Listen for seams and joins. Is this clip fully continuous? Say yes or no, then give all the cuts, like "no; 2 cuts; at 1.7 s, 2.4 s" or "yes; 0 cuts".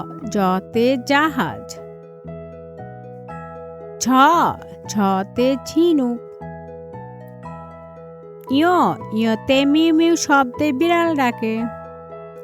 no; 4 cuts; at 1.6 s, 3.5 s, 6.2 s, 8.1 s